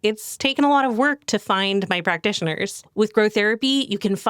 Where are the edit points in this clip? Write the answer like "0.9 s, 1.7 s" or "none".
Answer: 2.8 s